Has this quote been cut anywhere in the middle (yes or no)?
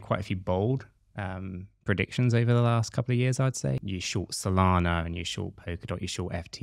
yes